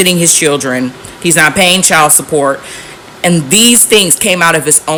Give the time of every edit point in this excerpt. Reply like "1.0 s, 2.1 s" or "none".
none